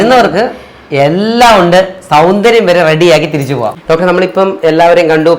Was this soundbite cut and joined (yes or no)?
yes